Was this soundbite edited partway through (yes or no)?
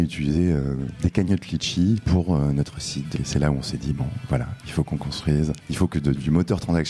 yes